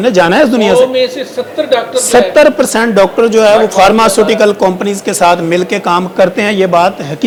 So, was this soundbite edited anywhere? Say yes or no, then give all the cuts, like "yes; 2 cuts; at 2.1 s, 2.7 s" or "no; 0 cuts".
no; 0 cuts